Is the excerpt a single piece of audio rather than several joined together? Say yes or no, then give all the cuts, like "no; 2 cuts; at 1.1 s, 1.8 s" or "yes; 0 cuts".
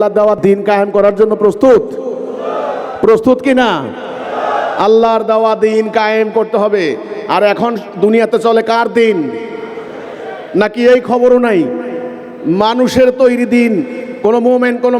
yes; 0 cuts